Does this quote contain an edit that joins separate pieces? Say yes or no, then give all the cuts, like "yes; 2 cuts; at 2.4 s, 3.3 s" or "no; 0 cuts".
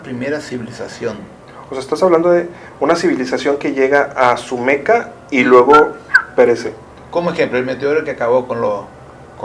no; 0 cuts